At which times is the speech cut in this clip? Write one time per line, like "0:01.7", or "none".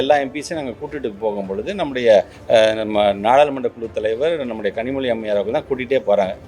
0:02.4